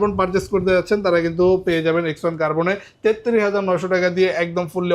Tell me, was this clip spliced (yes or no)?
no